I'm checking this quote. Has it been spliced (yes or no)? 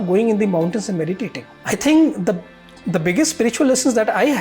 yes